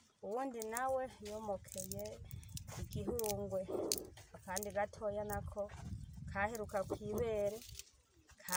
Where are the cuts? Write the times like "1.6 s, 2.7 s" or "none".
none